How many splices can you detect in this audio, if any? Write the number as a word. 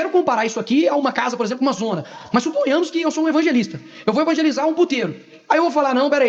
zero